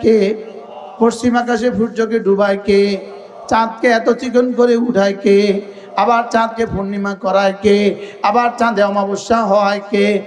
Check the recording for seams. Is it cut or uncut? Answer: uncut